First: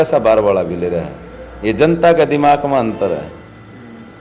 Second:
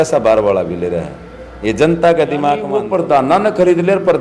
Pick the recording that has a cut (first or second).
second